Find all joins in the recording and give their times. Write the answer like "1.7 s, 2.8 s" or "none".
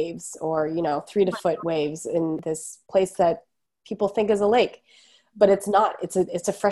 2.4 s